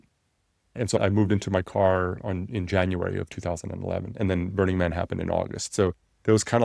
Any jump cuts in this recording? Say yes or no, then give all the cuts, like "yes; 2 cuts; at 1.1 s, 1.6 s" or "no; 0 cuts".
yes; 1 cut; at 0.9 s